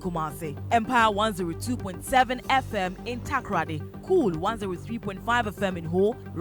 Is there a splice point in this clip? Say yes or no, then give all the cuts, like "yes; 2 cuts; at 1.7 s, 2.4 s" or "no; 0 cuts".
no; 0 cuts